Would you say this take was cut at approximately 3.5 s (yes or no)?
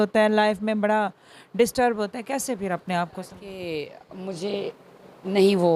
yes